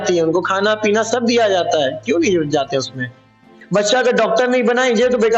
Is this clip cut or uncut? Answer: cut